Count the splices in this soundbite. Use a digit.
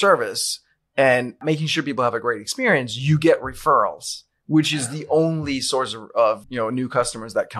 2